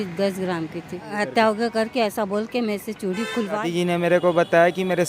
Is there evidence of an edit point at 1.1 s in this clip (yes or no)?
yes